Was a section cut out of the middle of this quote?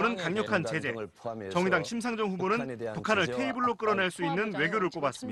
no; 0 cuts

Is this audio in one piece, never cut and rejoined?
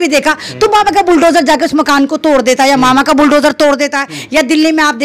yes; 0 cuts

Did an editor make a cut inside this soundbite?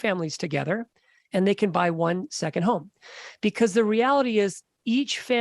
no; 0 cuts

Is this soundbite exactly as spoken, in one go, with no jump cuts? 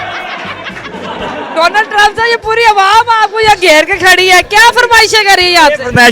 yes; 0 cuts

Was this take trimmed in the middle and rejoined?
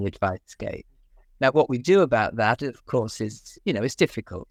no; 0 cuts

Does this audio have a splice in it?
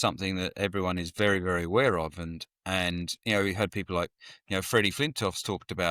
no; 0 cuts

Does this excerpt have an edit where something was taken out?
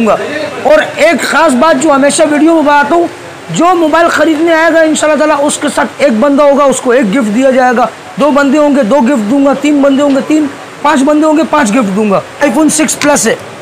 yes; 1 cut; at 12.4 s

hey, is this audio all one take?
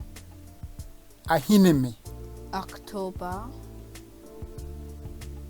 no; 2 cuts; at 0.9 s, 3.5 s

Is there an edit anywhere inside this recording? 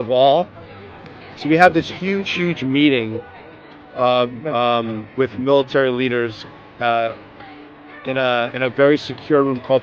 no; 0 cuts

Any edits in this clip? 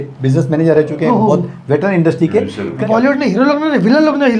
yes; 1 cut; at 2.8 s

